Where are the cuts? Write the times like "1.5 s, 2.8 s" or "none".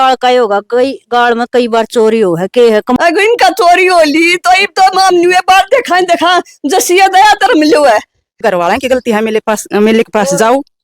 3.0 s, 8.4 s